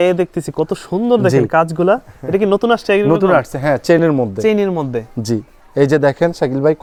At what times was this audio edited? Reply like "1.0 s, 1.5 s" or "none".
none